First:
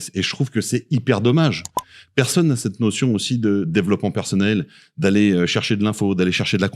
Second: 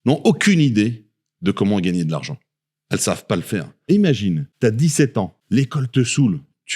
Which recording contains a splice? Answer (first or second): second